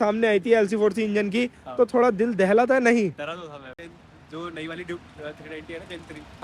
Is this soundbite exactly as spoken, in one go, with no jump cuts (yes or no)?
no